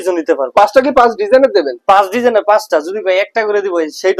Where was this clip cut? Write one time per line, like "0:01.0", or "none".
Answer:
none